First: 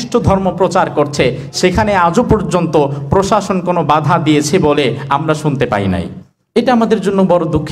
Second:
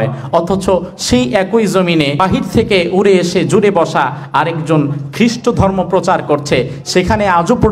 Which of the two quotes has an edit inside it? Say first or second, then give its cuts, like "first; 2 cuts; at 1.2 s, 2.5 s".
second; 1 cut; at 2.1 s